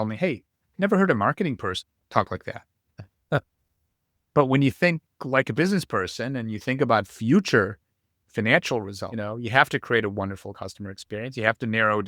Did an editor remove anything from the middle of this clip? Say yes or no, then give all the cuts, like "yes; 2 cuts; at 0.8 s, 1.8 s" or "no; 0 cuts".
yes; 2 cuts; at 1.9 s, 9.0 s